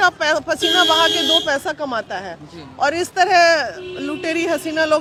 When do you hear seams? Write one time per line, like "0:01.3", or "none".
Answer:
none